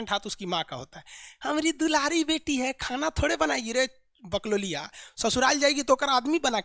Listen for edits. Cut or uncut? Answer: uncut